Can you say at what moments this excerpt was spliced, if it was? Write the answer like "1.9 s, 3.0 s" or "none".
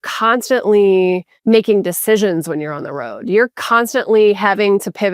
1.3 s